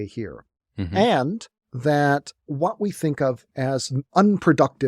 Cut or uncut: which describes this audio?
cut